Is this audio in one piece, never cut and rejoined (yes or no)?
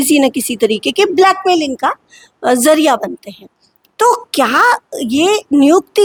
yes